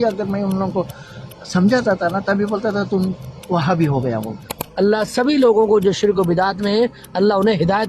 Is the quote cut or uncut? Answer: cut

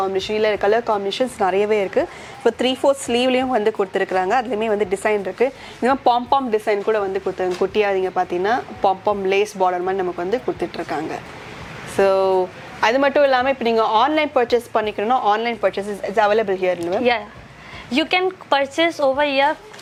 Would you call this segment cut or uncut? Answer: uncut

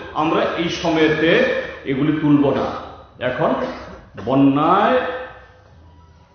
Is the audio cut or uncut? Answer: uncut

